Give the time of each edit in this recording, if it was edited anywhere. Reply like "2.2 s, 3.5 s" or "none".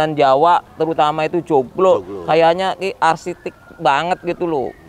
none